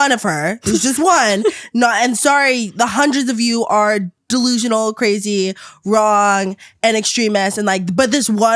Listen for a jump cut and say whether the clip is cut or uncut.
uncut